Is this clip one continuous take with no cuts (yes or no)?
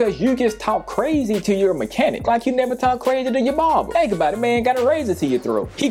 yes